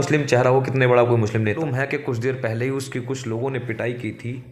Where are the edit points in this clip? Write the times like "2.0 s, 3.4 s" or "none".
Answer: 1.6 s